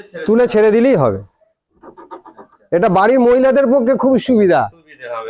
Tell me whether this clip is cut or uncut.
uncut